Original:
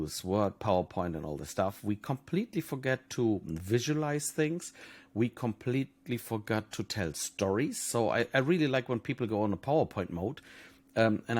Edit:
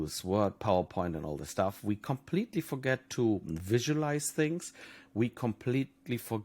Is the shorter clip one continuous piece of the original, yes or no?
yes